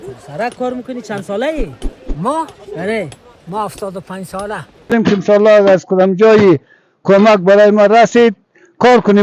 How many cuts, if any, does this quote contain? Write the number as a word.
one